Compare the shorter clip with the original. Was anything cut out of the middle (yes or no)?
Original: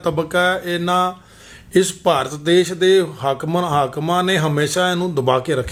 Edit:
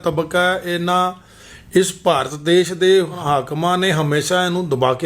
yes